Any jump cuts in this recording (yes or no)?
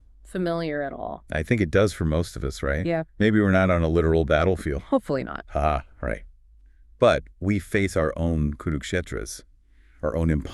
no